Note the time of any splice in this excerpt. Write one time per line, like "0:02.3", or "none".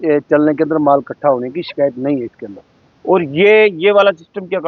none